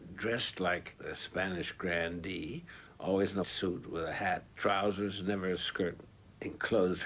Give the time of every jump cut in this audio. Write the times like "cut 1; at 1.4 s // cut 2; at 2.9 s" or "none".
cut 1; at 6.0 s